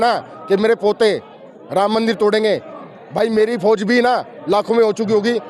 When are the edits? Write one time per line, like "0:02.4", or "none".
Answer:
none